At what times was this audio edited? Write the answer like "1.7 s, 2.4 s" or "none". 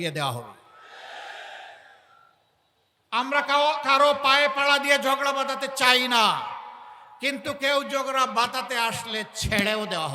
none